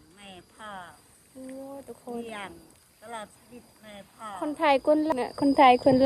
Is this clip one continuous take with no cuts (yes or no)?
yes